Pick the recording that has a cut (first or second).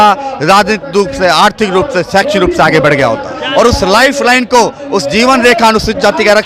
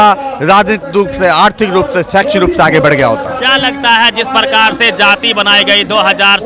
first